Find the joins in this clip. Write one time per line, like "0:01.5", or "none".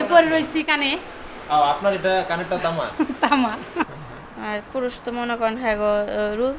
0:03.9